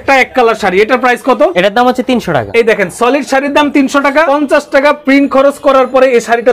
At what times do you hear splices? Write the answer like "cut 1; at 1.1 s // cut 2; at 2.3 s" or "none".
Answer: cut 1; at 1.5 s // cut 2; at 2.5 s // cut 3; at 4.3 s